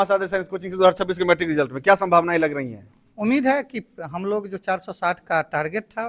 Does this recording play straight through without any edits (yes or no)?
yes